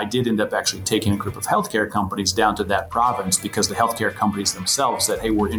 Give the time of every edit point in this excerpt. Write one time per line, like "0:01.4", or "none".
none